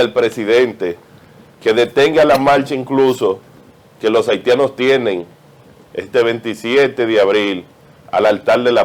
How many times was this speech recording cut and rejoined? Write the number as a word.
zero